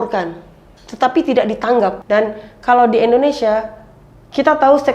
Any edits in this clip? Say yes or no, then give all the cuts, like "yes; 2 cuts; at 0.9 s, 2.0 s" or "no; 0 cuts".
yes; 1 cut; at 2.0 s